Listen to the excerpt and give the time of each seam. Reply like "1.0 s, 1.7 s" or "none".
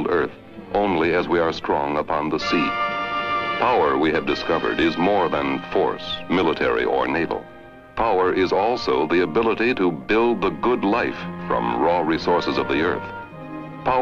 1.9 s